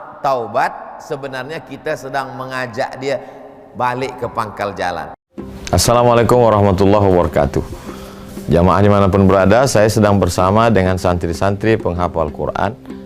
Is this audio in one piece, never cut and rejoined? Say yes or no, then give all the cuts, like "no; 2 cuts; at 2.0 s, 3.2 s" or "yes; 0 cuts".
no; 1 cut; at 5.2 s